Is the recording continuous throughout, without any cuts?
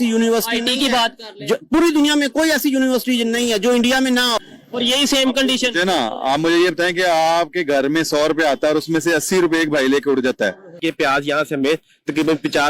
no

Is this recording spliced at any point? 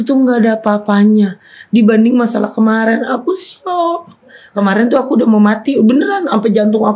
yes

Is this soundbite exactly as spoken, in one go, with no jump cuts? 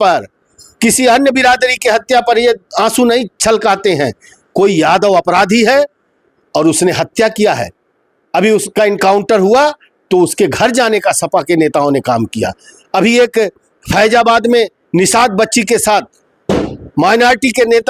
yes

